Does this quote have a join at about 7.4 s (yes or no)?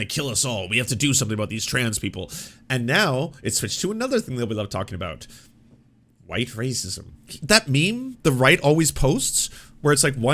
yes